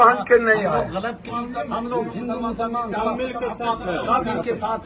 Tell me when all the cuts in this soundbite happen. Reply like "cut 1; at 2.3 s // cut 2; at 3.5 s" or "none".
cut 1; at 1.3 s